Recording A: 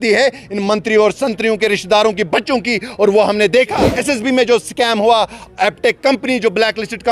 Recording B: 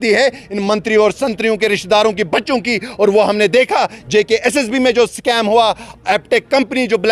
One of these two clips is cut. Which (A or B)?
A